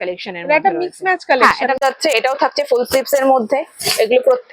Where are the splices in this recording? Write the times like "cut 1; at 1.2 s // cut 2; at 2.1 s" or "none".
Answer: cut 1; at 1.8 s